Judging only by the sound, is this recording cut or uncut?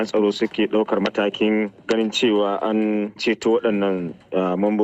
uncut